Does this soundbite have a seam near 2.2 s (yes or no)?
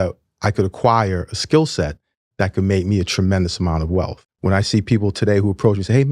no